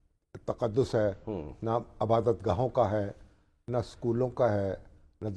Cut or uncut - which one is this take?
uncut